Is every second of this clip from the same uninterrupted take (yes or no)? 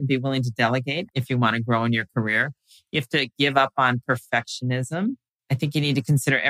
no